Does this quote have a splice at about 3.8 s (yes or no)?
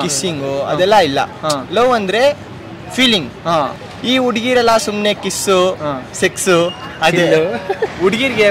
yes